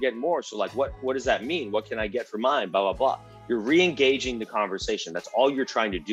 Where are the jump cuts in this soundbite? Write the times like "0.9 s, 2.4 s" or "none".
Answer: none